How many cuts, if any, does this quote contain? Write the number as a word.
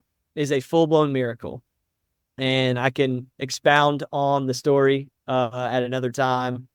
zero